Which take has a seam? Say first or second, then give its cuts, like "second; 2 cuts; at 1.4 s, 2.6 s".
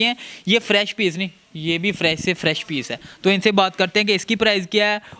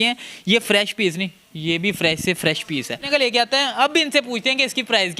second; 1 cut; at 3.1 s